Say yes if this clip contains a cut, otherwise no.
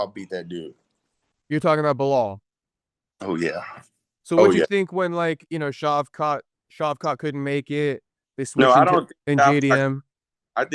no